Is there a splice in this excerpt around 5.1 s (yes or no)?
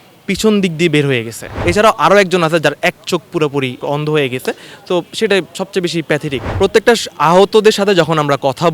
no